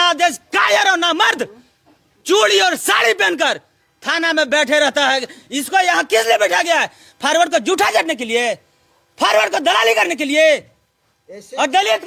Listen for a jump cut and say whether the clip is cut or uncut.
uncut